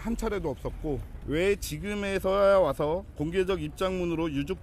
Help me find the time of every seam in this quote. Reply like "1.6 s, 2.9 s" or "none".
1.1 s